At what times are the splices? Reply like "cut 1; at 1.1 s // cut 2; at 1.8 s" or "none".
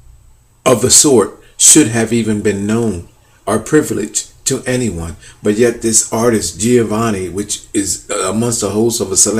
cut 1; at 3.3 s